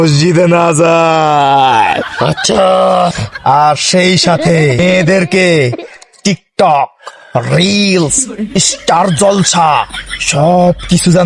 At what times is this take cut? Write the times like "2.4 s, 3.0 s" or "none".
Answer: none